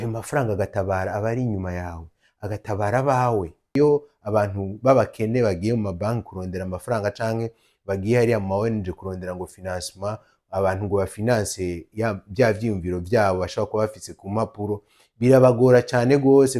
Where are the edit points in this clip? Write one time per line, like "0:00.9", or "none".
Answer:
0:03.7